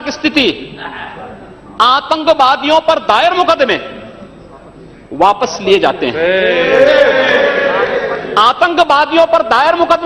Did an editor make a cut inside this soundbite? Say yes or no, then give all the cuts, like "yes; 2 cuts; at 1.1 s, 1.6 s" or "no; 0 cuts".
no; 0 cuts